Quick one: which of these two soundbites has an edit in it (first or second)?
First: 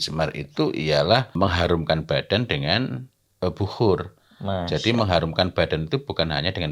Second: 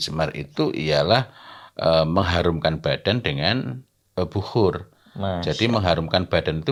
first